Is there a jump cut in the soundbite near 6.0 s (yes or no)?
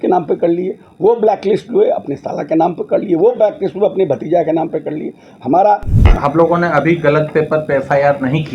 yes